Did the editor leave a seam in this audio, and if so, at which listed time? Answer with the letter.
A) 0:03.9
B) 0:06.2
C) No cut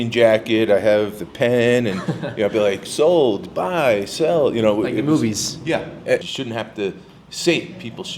B